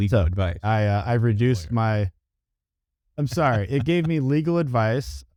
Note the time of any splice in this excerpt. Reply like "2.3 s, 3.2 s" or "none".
none